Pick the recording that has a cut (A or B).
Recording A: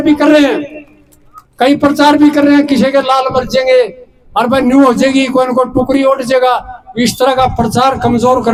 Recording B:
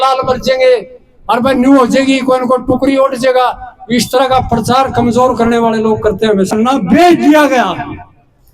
B